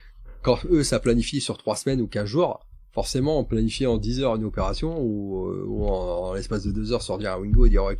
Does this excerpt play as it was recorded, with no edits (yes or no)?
yes